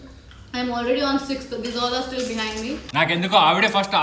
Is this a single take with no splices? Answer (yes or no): no